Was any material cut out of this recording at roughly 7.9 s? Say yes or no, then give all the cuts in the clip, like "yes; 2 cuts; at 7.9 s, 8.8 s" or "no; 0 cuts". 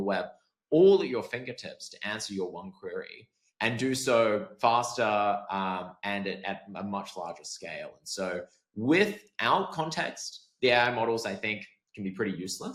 no; 0 cuts